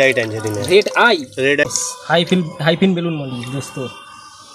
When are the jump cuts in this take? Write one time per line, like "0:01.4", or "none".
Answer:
0:01.6